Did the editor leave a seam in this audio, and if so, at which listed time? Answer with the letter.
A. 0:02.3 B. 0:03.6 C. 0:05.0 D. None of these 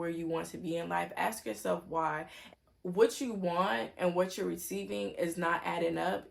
A